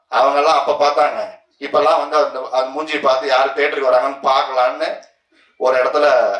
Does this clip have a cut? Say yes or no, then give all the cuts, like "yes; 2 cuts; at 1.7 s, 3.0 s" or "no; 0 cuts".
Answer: no; 0 cuts